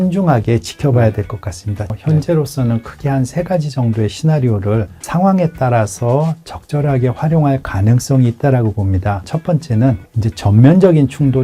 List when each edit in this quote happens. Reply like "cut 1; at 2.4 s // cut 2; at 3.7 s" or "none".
cut 1; at 2.0 s // cut 2; at 9.3 s